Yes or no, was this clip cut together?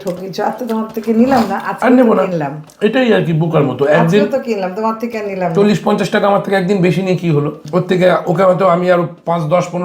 yes